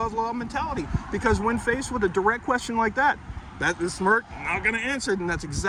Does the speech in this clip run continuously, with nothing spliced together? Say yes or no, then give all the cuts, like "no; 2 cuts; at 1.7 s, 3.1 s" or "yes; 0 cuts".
yes; 0 cuts